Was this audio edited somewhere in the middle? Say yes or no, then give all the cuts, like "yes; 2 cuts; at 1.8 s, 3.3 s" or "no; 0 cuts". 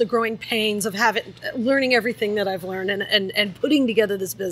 no; 0 cuts